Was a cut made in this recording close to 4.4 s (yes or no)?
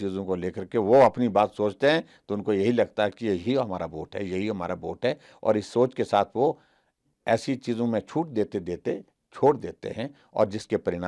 no